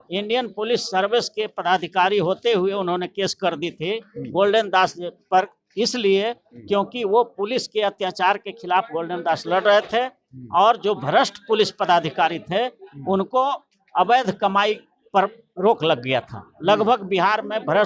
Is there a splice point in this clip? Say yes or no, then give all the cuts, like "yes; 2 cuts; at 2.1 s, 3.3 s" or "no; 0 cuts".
no; 0 cuts